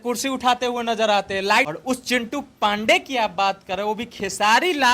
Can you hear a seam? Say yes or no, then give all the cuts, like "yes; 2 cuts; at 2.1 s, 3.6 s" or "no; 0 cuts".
yes; 1 cut; at 1.7 s